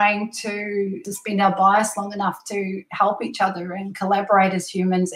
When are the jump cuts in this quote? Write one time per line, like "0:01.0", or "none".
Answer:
0:01.1